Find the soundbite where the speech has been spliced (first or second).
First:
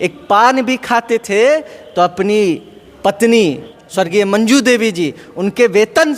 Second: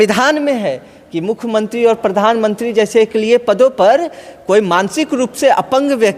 first